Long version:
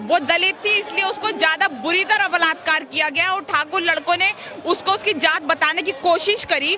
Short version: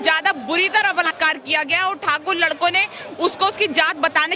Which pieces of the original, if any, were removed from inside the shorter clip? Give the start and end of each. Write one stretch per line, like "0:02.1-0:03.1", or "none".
0:02.4-0:02.5